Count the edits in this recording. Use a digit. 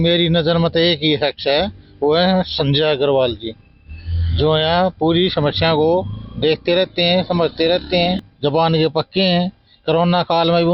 1